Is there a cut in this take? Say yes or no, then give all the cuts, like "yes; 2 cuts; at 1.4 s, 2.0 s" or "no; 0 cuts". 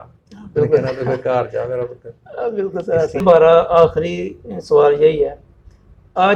yes; 1 cut; at 3.2 s